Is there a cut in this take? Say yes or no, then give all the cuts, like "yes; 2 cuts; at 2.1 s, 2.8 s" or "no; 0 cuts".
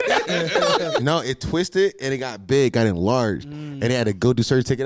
yes; 1 cut; at 1.0 s